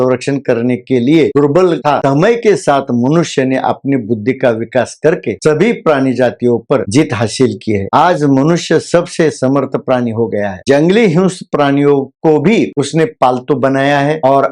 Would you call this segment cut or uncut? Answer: cut